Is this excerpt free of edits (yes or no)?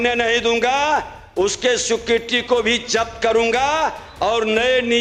yes